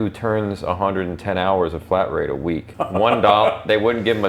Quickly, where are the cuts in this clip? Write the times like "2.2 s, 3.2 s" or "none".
2.7 s